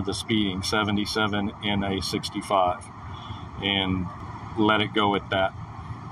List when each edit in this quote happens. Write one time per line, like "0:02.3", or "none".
0:04.2